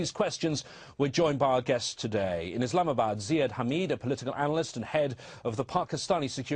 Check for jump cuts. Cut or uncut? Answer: cut